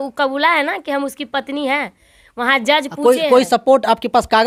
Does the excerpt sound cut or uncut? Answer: uncut